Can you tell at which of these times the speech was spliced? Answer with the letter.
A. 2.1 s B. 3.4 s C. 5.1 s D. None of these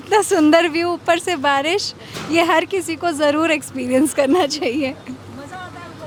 D